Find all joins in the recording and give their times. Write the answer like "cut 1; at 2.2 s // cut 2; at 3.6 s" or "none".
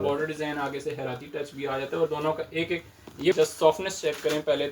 cut 1; at 3.3 s

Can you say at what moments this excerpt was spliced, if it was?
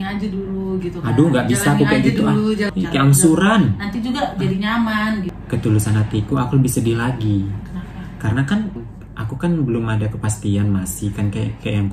cut 1; at 2.7 s // cut 2; at 5.4 s // cut 3; at 8.9 s

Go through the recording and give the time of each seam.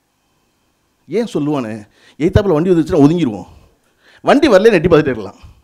none

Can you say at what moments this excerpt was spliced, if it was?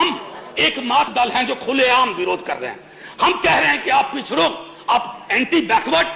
cut 1; at 1.1 s

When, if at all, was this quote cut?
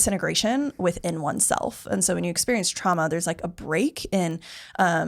none

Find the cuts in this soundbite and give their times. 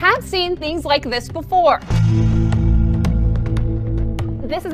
cut 1; at 1.9 s

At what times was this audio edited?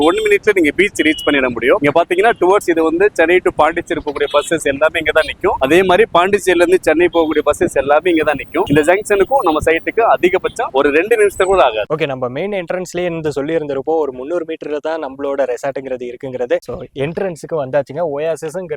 none

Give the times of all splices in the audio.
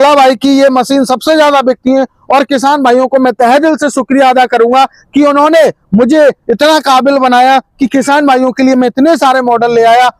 none

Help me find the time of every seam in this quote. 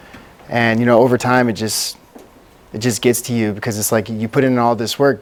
none

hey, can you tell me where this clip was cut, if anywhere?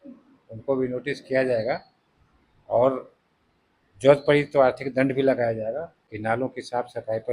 cut 1; at 5.9 s

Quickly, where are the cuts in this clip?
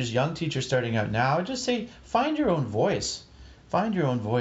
none

